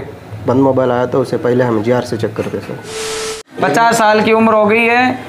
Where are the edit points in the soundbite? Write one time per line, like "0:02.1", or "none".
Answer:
0:03.1